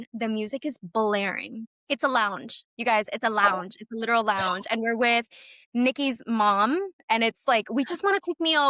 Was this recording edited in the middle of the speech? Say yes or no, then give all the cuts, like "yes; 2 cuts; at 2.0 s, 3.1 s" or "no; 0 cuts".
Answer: no; 0 cuts